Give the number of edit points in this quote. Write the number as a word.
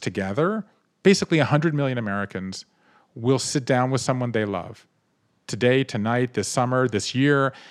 one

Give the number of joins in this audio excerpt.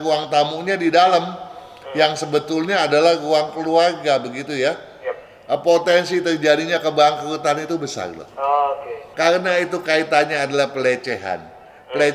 one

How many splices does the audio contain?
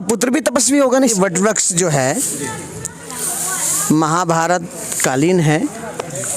one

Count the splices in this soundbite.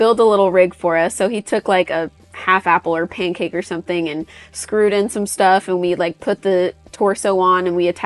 zero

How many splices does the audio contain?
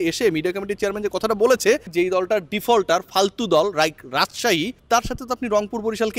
two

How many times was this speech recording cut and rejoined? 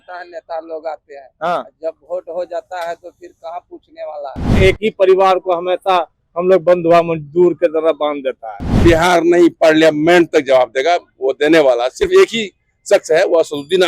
two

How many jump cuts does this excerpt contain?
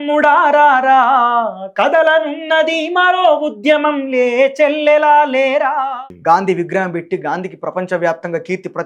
one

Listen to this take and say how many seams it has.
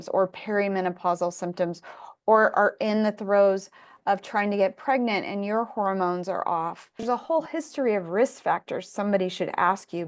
one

